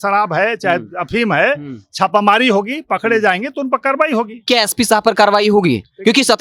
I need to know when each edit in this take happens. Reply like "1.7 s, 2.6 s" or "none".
4.5 s